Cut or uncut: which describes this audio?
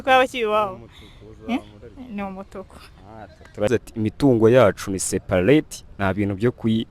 cut